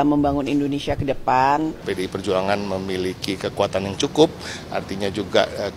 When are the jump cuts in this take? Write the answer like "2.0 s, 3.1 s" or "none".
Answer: 1.8 s